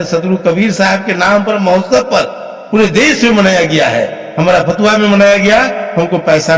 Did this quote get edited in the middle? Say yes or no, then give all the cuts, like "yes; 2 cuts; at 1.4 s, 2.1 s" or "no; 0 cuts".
no; 0 cuts